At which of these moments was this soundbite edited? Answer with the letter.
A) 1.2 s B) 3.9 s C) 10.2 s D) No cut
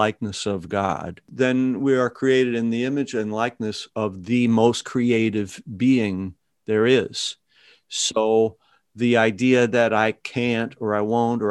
A